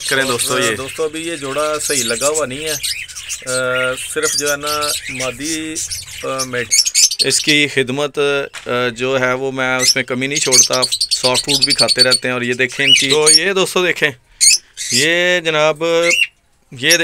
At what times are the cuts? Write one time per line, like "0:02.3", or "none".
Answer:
0:00.9
0:06.7
0:13.1